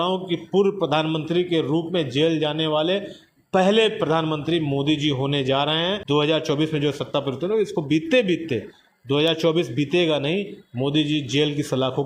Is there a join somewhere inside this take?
no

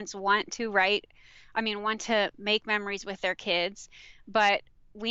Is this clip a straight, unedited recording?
yes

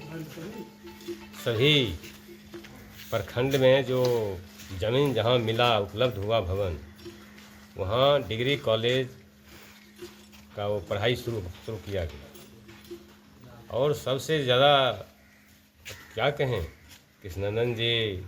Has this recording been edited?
no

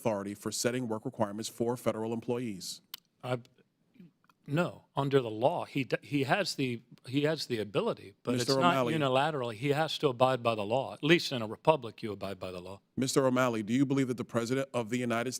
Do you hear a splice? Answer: no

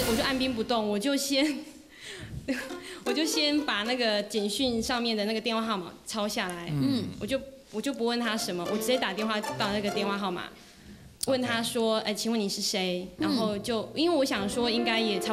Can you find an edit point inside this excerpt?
no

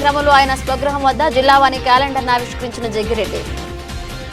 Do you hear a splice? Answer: yes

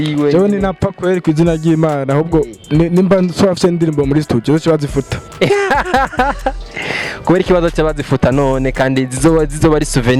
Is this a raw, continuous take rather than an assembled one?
yes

